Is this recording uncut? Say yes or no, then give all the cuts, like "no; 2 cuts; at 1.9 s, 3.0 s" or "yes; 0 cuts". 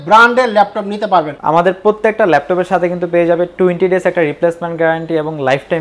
no; 1 cut; at 1.4 s